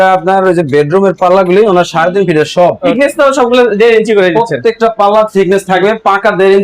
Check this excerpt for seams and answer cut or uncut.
cut